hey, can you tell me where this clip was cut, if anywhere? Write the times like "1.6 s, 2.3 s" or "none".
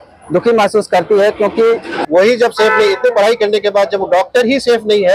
2.0 s